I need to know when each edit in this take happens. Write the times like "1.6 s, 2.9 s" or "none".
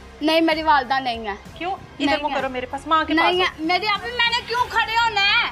none

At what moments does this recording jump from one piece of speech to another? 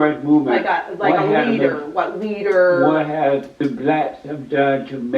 3.5 s

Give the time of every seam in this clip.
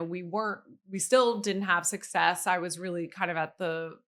none

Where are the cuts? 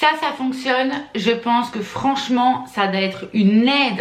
none

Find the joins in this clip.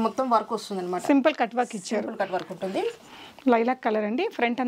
none

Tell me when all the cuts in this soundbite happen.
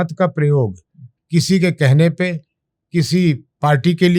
none

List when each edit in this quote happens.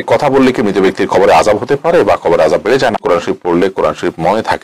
3.0 s

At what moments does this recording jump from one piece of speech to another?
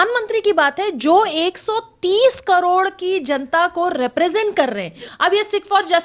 5.0 s

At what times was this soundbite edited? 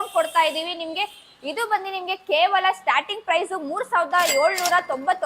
none

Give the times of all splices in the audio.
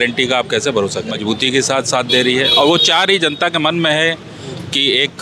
1.2 s

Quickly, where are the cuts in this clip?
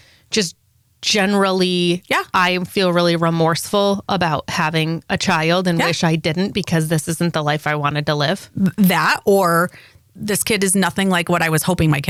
none

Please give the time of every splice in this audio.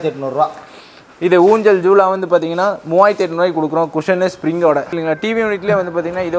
4.9 s

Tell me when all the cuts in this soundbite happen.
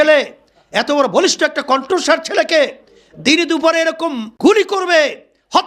4.3 s

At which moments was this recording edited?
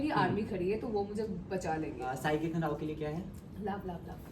2.1 s

